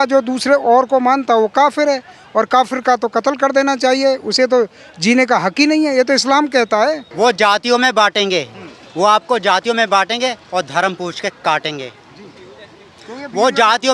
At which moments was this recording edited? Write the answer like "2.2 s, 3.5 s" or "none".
7.1 s